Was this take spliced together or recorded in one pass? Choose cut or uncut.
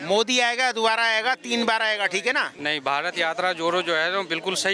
cut